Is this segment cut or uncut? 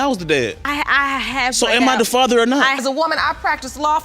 cut